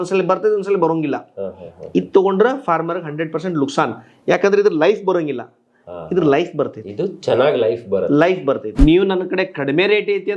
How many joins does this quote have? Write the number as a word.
one